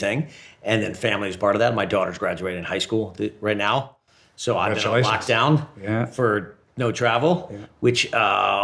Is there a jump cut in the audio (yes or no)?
no